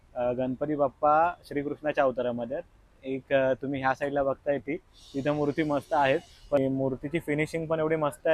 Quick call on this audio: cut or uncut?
cut